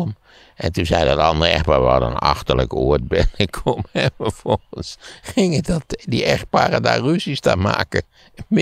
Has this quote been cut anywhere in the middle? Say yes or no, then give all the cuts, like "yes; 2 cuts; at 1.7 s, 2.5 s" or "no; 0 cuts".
no; 0 cuts